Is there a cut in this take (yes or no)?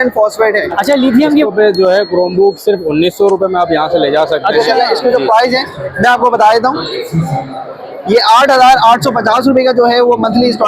yes